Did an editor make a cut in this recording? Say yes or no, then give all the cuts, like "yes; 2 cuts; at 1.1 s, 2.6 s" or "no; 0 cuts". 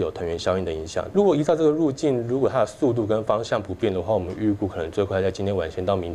yes; 1 cut; at 1.1 s